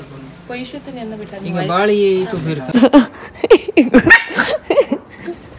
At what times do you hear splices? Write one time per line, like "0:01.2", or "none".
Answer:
0:02.7